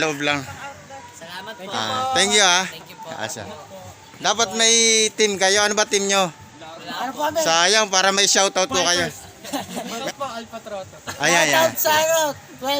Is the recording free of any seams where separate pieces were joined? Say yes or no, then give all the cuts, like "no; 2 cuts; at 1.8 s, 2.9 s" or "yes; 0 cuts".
no; 1 cut; at 9.9 s